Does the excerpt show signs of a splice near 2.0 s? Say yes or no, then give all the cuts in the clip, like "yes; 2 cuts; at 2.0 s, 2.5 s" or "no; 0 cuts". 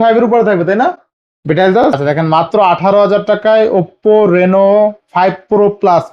yes; 1 cut; at 2.0 s